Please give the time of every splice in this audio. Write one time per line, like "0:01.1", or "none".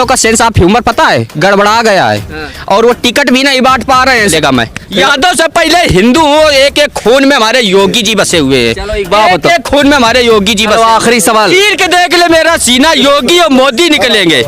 0:04.3